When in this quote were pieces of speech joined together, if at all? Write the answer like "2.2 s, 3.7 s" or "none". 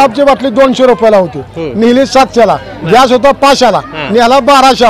none

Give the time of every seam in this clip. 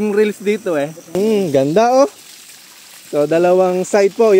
1.2 s

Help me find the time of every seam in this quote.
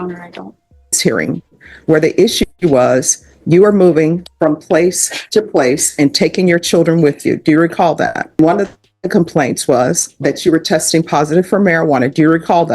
1.0 s, 8.4 s

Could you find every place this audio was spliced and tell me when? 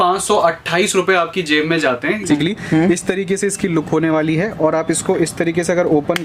2.3 s

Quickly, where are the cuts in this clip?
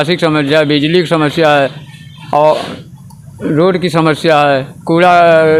none

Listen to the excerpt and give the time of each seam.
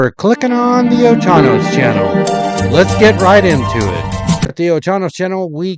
4.5 s

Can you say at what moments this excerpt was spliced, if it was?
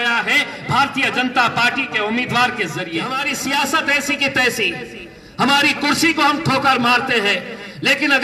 3.1 s

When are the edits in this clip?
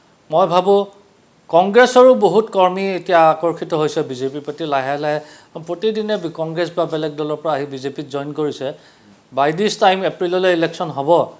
none

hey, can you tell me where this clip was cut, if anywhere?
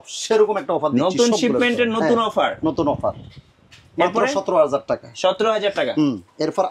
none

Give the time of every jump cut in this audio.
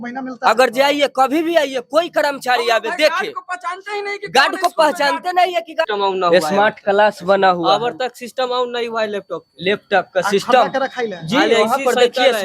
5.9 s

